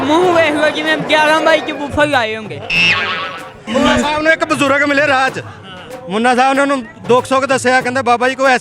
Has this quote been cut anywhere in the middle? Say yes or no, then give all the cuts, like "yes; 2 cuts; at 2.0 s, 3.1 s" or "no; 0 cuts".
yes; 1 cut; at 3.7 s